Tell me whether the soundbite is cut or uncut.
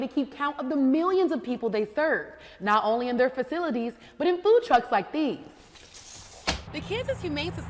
cut